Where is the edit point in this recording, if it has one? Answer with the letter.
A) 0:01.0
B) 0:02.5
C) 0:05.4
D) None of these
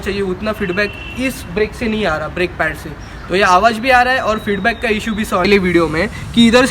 C